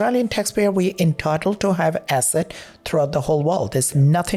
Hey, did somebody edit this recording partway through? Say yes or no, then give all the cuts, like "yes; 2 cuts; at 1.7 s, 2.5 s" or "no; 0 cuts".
no; 0 cuts